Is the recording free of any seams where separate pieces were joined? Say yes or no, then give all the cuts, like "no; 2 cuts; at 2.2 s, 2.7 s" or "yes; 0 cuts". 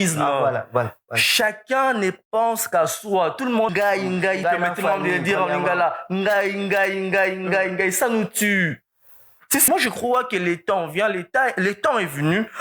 no; 2 cuts; at 3.7 s, 9.7 s